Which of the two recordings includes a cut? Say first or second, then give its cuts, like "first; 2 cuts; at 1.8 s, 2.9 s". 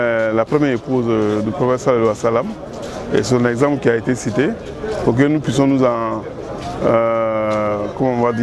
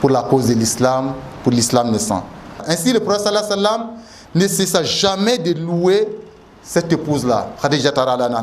second; 1 cut; at 2.6 s